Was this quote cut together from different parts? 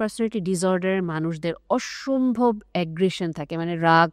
no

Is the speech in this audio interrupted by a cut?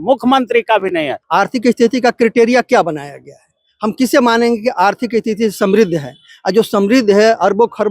yes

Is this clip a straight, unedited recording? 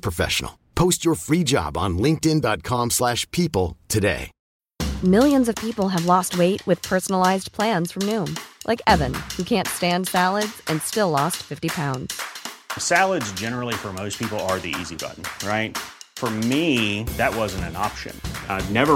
no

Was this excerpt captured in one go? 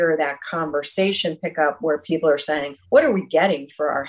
no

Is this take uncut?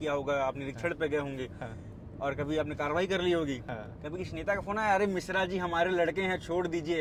yes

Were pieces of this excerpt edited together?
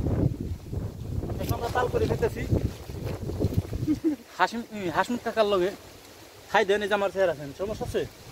no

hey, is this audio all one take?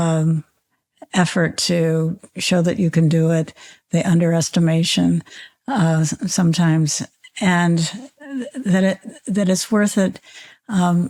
yes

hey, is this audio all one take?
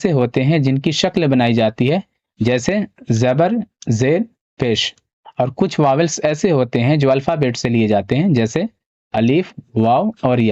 yes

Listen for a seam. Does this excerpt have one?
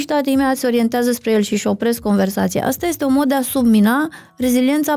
no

